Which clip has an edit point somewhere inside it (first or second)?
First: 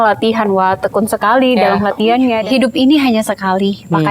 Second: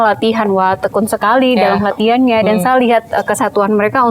first